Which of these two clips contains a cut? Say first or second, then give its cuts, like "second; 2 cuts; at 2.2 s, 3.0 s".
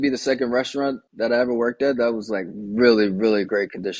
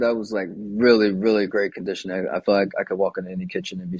first; 1 cut; at 1.1 s